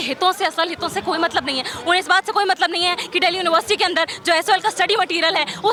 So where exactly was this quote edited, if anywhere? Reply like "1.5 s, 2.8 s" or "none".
none